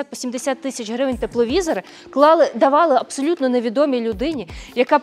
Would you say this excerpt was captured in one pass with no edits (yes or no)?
yes